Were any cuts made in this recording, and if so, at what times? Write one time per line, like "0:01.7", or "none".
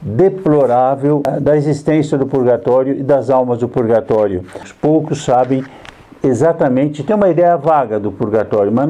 0:01.3
0:04.7

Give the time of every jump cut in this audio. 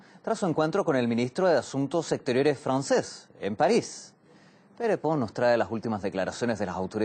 0:01.3

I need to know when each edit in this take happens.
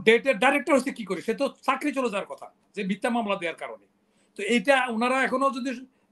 none

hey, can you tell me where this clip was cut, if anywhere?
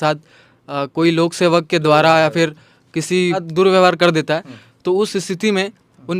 0:03.5

